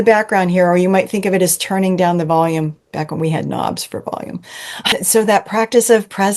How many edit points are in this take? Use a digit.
1